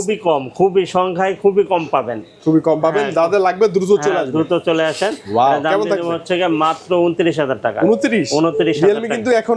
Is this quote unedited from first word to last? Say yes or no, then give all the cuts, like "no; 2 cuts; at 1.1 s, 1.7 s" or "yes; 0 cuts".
yes; 0 cuts